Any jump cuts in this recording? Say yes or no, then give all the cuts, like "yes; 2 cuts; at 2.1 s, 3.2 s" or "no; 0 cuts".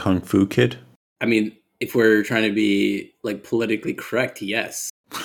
no; 0 cuts